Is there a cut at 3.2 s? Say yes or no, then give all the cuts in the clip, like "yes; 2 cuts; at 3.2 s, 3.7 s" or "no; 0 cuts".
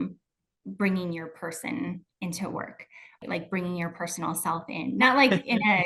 yes; 2 cuts; at 3.2 s, 5.0 s